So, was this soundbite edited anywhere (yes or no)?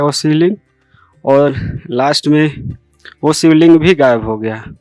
no